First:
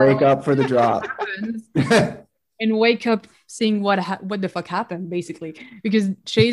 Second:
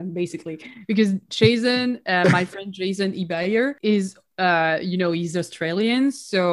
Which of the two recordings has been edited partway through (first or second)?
second